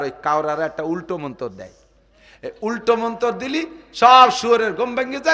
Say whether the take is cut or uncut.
uncut